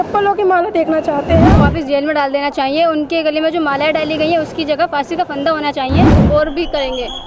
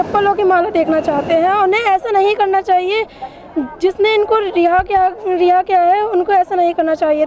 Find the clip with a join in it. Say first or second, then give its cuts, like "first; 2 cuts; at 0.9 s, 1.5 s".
first; 2 cuts; at 1.5 s, 6.2 s